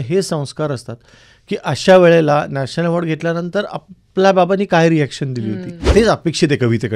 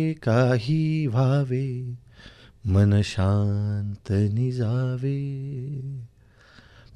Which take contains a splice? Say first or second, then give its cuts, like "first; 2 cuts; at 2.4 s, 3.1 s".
first; 1 cut; at 5.8 s